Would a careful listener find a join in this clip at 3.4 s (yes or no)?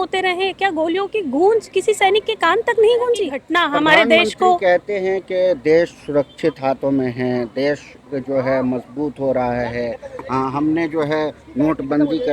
yes